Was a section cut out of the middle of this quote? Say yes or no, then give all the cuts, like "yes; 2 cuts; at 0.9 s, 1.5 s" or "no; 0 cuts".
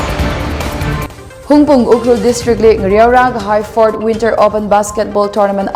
yes; 1 cut; at 1.0 s